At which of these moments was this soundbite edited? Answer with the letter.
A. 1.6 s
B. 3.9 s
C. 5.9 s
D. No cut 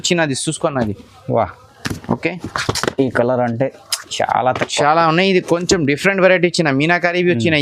D